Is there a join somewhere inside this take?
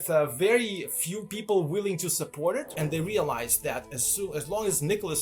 yes; 1 cut; at 2.7 s

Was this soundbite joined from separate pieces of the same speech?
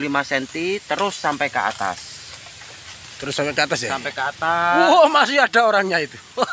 no; 0 cuts

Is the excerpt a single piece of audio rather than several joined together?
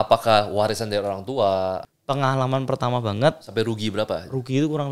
no; 1 cut; at 1.9 s

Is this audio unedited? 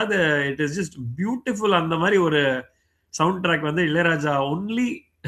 yes; 0 cuts

